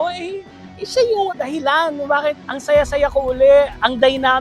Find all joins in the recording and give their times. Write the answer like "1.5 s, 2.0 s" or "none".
1.3 s, 2.5 s